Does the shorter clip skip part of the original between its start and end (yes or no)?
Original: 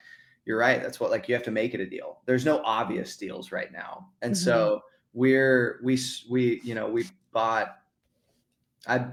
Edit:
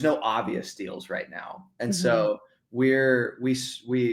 no